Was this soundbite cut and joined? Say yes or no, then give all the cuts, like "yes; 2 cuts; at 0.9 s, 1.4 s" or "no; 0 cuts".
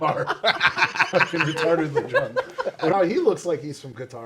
yes; 1 cut; at 2.9 s